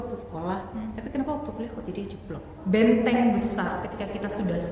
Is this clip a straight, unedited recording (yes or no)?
no